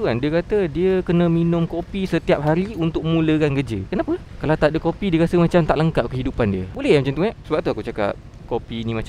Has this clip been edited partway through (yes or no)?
no